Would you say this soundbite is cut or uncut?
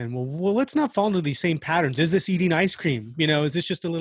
uncut